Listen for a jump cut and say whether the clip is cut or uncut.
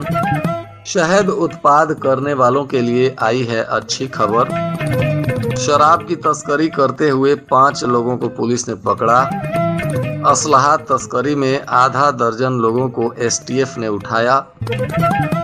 uncut